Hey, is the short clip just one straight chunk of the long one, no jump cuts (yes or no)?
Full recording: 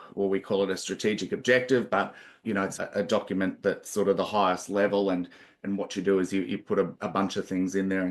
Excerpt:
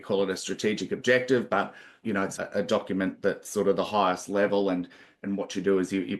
yes